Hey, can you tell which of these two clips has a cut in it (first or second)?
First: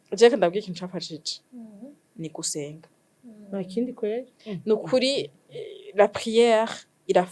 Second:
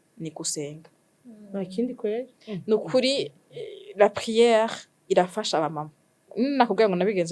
second